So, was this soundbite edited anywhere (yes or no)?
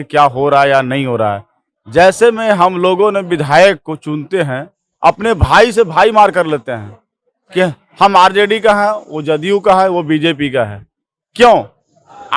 no